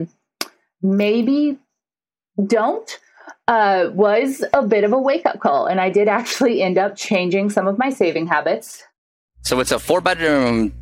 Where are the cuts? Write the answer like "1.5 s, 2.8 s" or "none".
9.0 s